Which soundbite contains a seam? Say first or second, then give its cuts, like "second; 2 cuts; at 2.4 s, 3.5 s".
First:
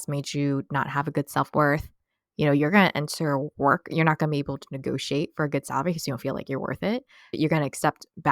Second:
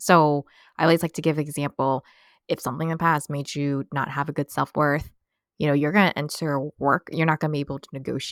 first; 1 cut; at 7.4 s